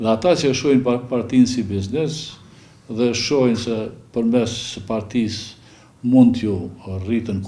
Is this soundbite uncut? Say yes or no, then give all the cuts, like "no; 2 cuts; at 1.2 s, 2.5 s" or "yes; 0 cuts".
yes; 0 cuts